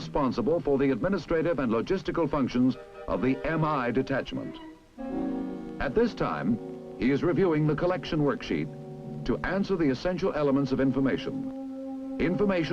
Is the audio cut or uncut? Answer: cut